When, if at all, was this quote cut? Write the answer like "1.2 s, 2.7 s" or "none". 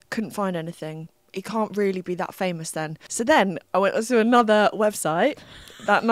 1.1 s, 3.0 s